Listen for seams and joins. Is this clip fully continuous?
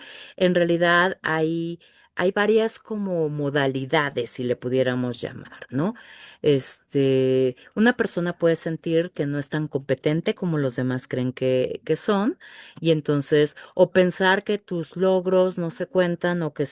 yes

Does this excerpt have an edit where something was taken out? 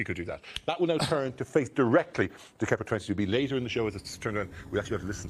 yes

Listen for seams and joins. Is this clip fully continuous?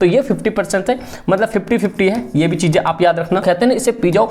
no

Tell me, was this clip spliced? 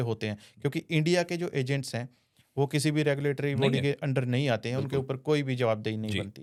no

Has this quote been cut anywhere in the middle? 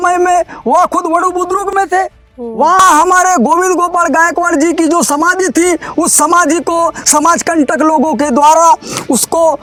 no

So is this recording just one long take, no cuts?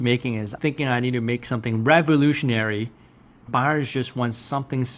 no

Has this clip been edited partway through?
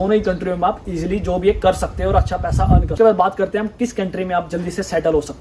yes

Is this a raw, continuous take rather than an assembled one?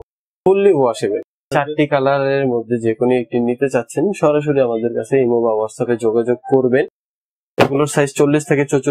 no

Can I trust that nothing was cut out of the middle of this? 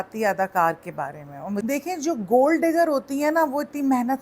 no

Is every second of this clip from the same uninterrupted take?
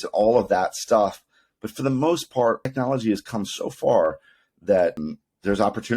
no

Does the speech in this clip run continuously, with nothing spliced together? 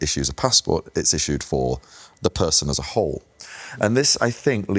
yes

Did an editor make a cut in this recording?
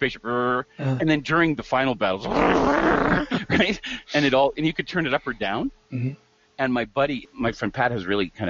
yes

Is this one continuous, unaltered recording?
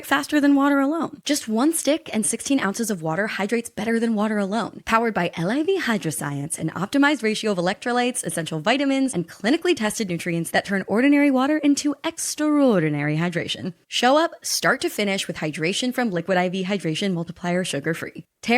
no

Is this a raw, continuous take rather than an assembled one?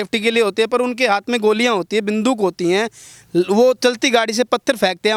yes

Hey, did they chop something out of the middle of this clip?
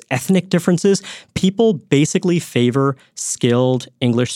no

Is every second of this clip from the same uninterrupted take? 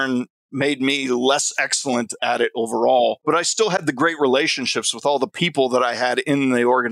no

